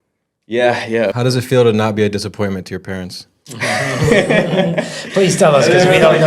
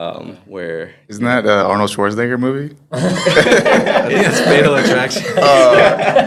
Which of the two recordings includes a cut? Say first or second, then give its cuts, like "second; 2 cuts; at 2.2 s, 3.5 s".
first; 1 cut; at 1.2 s